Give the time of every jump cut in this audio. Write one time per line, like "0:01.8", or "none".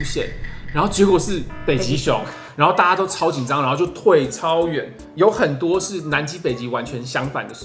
0:05.1